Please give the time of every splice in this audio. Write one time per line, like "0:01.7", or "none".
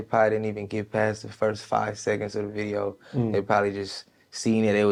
none